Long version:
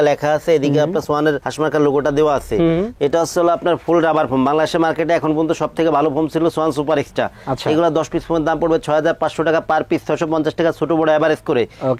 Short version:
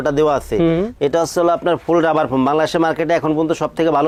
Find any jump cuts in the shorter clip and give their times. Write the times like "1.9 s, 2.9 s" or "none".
none